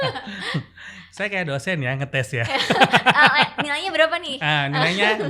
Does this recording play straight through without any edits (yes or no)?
yes